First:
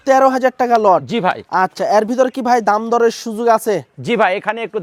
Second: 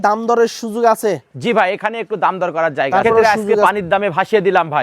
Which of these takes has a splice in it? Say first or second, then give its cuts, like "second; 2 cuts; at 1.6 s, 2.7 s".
second; 1 cut; at 3.6 s